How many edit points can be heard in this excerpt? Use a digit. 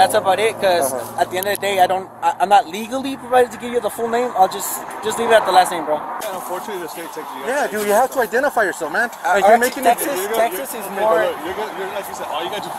1